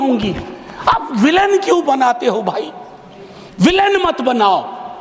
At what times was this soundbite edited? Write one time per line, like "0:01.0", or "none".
none